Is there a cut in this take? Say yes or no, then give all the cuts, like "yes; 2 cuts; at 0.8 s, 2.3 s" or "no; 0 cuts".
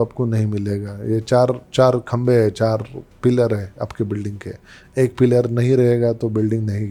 no; 0 cuts